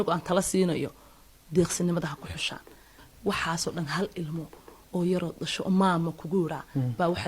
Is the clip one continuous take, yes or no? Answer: no